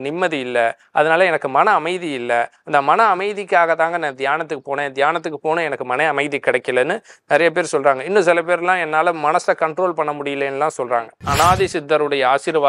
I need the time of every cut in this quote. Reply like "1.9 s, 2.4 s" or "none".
11.2 s